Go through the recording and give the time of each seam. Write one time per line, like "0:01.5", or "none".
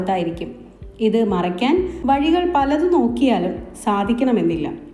0:01.9

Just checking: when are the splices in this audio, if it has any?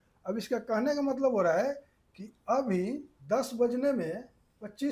0:03.1

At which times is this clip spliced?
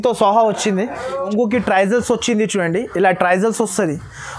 0:01.3

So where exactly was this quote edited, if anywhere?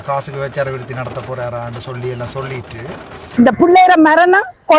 0:03.2

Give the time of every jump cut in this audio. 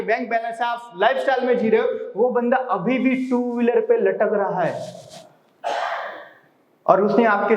none

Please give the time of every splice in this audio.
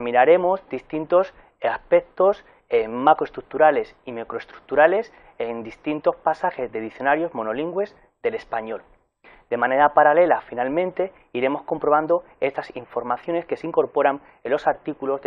0:03.4

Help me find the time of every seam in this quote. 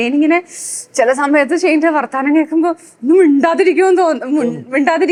none

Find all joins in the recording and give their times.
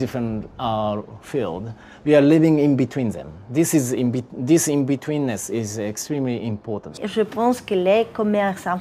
0:07.0

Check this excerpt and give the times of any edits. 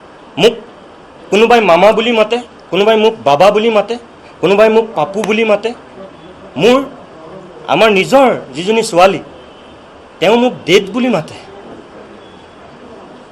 none

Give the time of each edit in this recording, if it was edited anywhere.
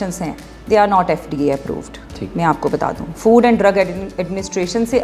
none

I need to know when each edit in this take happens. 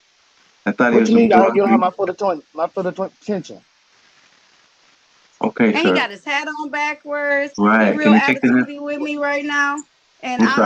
none

